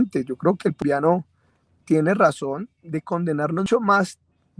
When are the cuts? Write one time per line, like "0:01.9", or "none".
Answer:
0:00.8
0:03.7